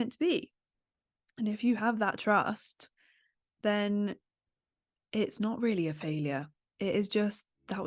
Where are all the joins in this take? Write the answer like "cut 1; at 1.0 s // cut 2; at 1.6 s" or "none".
none

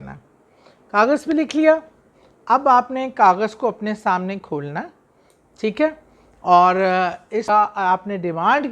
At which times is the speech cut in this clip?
cut 1; at 7.4 s

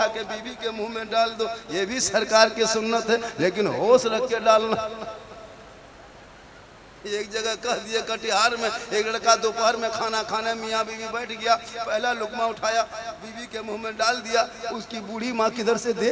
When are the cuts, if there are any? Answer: none

